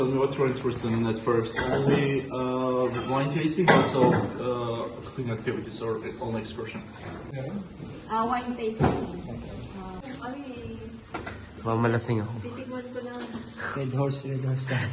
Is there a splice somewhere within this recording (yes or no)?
yes